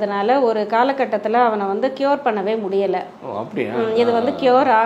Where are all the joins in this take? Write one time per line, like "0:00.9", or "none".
none

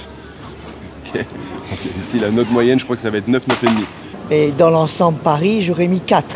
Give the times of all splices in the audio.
0:04.2

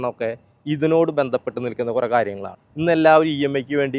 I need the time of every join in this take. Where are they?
0:02.5

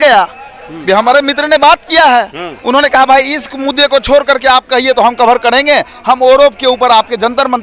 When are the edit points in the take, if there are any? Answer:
none

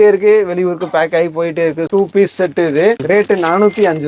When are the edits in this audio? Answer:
0:01.8
0:03.0

